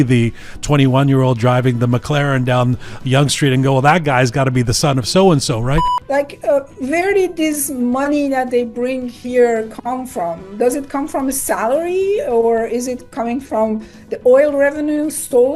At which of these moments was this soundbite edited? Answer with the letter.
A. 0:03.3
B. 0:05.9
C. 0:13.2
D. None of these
B